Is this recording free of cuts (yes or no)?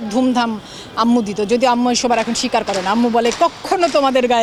yes